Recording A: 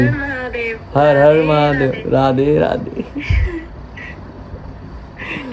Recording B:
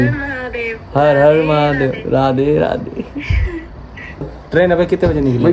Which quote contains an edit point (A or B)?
B